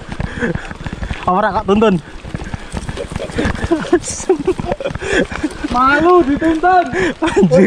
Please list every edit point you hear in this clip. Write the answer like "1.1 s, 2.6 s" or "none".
none